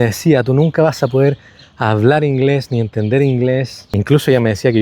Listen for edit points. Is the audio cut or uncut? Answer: uncut